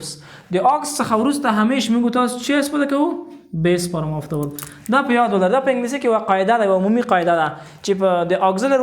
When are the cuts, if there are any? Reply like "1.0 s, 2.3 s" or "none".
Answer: none

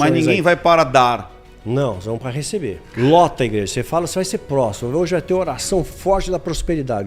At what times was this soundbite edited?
2.8 s

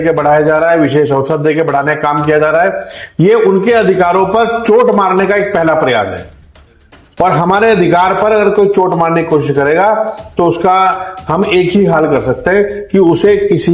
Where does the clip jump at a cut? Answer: none

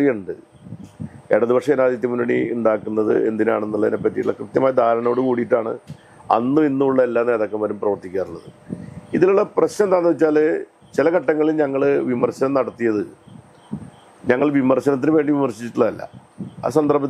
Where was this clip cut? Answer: none

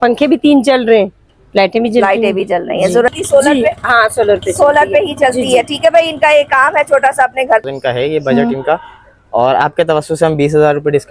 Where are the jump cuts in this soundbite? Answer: 3.2 s, 7.6 s

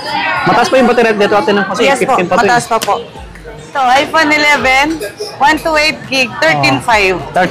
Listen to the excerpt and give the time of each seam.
3.7 s

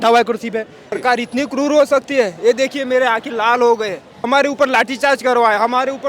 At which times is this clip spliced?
0.9 s, 4.3 s

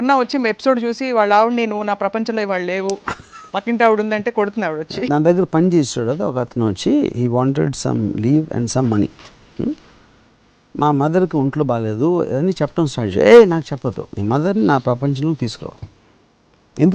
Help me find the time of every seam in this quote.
5.0 s

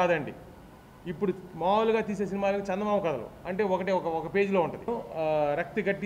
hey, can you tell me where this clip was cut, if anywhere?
4.9 s

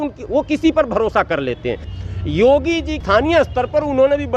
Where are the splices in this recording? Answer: 1.9 s, 3.0 s

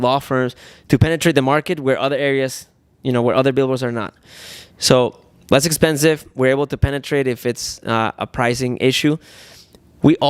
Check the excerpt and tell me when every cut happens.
none

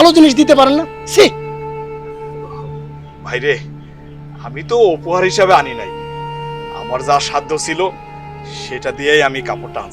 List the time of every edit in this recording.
none

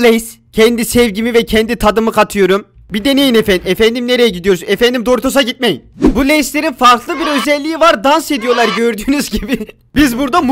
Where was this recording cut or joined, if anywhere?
5.9 s

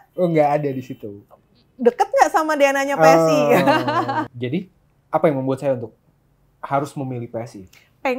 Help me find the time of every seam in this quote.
4.2 s

